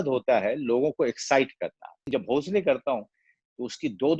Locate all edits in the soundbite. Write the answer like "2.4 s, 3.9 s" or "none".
2.0 s